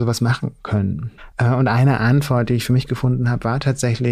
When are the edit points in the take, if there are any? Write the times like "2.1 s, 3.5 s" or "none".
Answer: 1.1 s